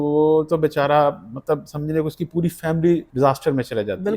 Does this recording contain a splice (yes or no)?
yes